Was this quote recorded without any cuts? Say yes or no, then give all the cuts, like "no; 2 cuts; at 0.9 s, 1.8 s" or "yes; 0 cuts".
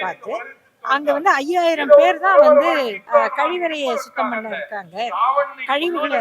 no; 1 cut; at 3.0 s